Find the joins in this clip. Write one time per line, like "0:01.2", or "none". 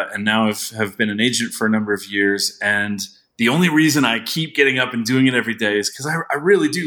none